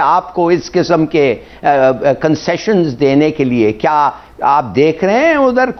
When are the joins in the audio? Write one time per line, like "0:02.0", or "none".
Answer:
none